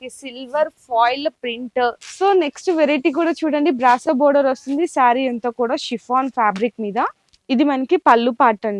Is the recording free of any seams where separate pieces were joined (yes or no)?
no